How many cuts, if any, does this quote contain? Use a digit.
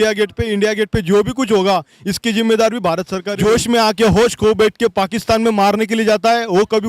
1